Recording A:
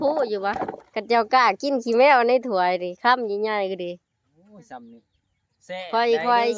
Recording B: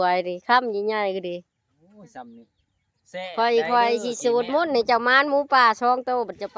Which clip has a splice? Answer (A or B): A